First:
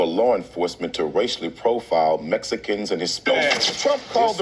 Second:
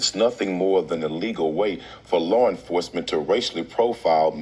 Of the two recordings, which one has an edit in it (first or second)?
first